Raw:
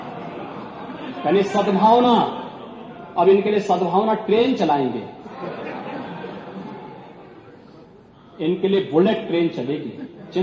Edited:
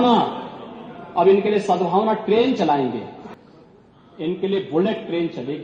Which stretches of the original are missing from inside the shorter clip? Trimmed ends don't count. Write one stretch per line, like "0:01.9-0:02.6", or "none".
0:05.2-0:07.4